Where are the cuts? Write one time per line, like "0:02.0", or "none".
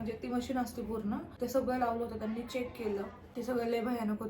0:01.3
0:03.2